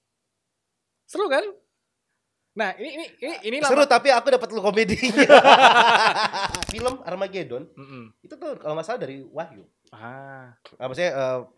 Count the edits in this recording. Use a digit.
1